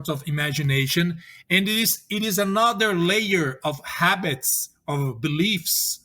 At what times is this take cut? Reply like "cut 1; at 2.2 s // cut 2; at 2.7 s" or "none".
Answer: none